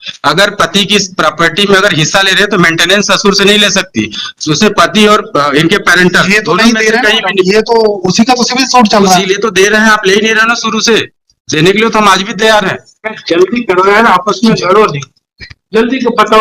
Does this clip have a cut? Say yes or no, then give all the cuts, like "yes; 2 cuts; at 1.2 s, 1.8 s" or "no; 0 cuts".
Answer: no; 0 cuts